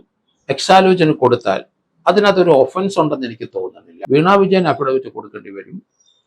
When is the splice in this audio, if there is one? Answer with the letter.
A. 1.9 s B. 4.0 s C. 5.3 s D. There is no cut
B